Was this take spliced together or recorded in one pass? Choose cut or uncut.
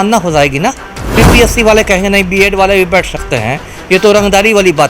cut